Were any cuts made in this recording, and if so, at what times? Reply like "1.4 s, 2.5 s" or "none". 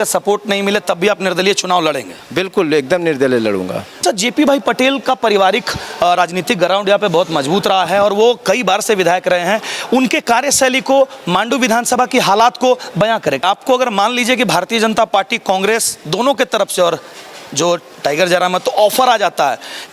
3.9 s, 13.4 s